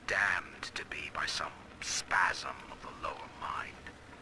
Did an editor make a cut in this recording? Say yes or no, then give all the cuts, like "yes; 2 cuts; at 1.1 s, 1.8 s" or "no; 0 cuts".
yes; 1 cut; at 2.2 s